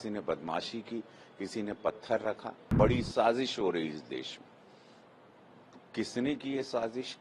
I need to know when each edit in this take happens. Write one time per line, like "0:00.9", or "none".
0:02.6